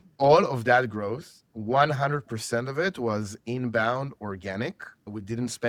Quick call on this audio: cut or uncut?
uncut